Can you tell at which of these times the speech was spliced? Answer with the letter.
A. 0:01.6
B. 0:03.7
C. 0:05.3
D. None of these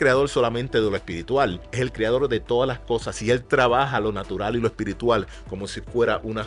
A